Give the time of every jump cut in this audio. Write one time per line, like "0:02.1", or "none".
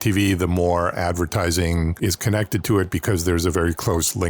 0:01.9